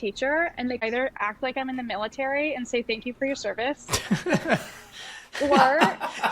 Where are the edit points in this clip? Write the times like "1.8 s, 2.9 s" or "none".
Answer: 1.1 s

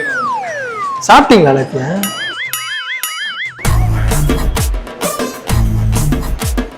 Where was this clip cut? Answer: none

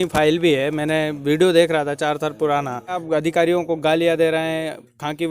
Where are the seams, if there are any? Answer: 3.0 s

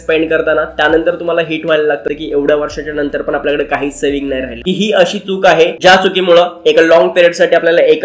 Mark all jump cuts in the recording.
2.1 s, 4.6 s

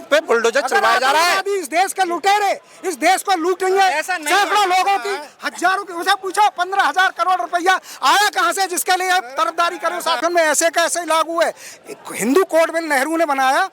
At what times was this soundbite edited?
10.2 s

